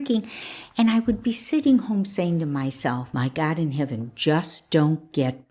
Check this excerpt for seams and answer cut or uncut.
uncut